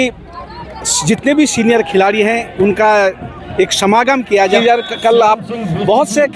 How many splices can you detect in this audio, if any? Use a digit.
1